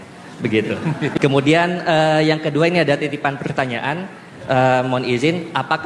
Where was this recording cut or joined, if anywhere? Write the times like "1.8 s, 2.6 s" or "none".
1.1 s